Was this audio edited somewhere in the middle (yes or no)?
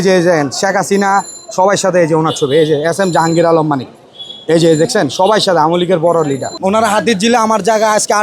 yes